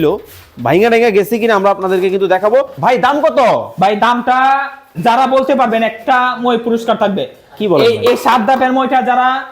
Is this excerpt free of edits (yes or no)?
no